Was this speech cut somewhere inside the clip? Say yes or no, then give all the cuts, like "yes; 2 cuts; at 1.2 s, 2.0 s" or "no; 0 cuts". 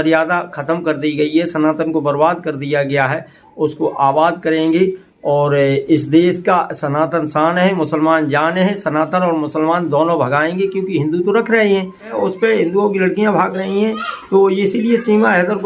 yes; 1 cut; at 12.1 s